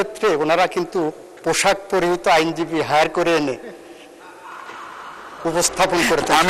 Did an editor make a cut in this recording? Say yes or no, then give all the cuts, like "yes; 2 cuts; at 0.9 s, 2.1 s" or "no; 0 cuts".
no; 0 cuts